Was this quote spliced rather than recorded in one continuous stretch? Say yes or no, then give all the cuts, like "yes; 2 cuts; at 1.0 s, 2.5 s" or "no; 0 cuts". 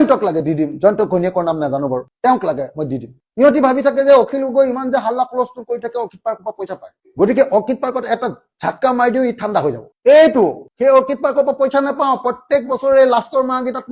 yes; 1 cut; at 3.2 s